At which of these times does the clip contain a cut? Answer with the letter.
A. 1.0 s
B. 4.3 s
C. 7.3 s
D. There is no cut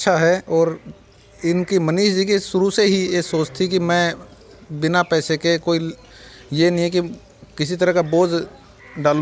D